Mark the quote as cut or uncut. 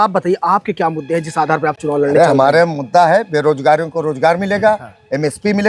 uncut